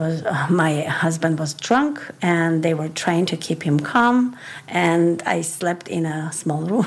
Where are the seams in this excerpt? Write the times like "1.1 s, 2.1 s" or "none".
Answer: none